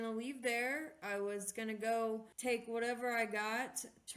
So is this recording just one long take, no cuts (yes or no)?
no